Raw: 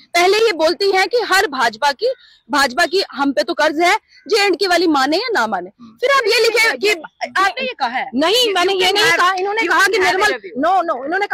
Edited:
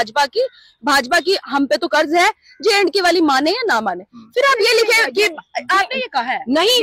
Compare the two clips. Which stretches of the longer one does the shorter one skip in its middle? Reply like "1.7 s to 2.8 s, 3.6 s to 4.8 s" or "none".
none